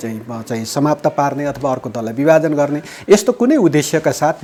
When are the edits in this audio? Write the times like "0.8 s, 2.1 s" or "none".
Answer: none